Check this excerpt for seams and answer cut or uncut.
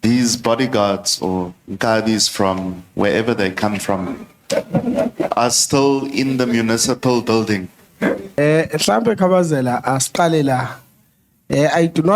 cut